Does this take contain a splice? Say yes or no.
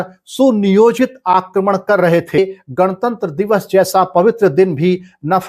yes